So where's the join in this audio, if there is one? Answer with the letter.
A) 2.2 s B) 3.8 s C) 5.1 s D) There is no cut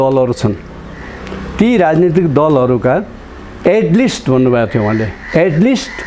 D